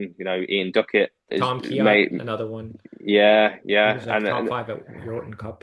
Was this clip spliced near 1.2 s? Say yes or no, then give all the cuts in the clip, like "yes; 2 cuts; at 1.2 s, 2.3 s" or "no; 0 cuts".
yes; 1 cut; at 1.2 s